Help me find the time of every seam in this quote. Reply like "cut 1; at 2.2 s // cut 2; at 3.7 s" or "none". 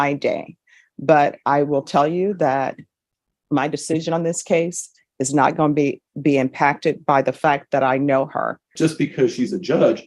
cut 1; at 8.7 s